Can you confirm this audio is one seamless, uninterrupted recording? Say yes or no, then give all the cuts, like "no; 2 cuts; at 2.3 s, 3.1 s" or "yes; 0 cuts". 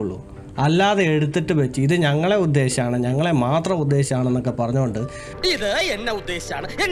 yes; 0 cuts